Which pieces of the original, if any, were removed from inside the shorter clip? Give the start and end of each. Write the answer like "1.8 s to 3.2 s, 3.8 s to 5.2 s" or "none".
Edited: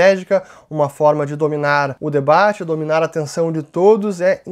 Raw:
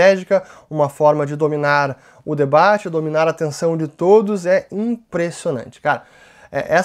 2.0 s to 2.2 s

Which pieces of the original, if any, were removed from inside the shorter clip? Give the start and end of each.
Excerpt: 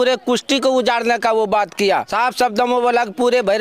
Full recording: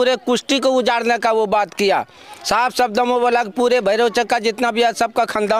2.1 s to 2.5 s

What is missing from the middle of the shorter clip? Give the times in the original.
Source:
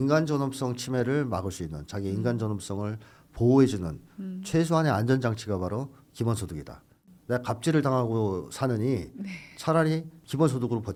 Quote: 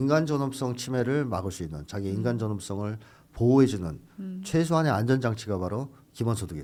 none

